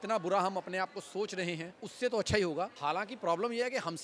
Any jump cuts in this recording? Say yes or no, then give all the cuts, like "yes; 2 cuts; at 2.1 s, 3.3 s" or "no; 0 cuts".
yes; 2 cuts; at 1.8 s, 2.7 s